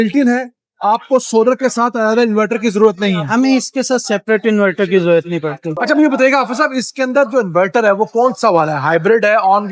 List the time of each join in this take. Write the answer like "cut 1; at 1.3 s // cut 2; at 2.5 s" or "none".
cut 1; at 5.8 s